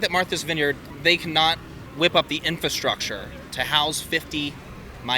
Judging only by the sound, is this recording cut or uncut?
cut